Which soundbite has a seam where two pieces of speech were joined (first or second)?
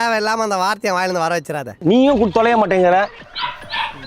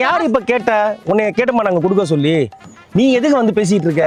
first